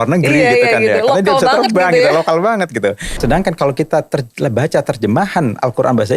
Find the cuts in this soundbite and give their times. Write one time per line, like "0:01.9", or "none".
0:03.1